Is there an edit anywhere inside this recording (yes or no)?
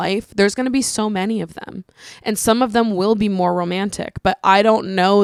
no